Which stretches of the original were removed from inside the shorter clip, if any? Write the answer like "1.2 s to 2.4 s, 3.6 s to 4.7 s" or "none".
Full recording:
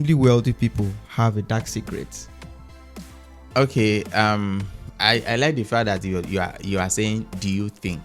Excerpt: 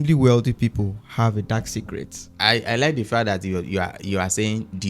2.2 s to 4.8 s